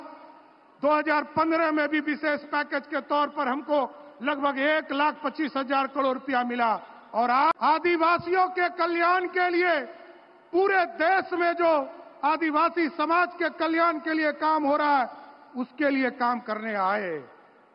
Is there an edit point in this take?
yes; 1 cut; at 7.5 s

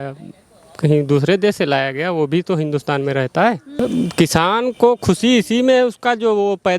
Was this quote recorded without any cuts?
no; 1 cut; at 3.7 s

